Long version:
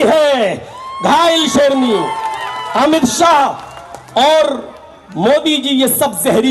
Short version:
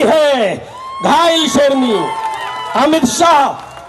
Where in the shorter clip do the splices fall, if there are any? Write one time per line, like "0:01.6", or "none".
none